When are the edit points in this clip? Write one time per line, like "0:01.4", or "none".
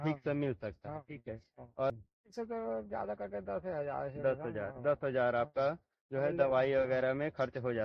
0:01.9